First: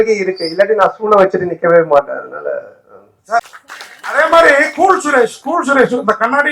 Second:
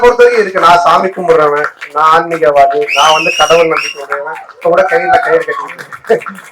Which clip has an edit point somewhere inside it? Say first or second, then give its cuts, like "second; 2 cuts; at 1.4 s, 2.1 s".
first; 1 cut; at 3.5 s